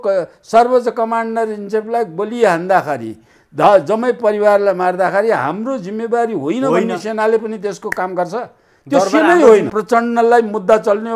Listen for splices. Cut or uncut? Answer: cut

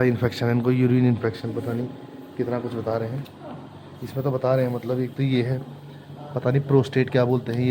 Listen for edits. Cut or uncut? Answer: uncut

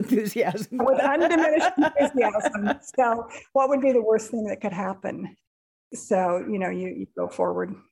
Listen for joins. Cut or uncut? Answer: uncut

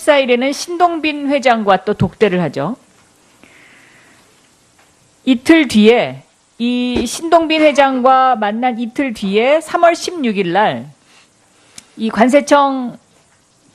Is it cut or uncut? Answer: cut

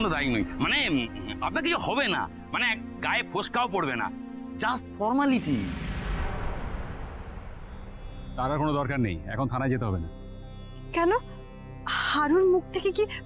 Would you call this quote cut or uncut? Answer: cut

